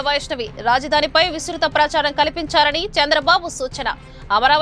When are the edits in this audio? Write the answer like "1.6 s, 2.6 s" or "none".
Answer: none